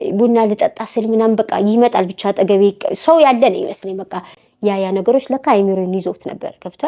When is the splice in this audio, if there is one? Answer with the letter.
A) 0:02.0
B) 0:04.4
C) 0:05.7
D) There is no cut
B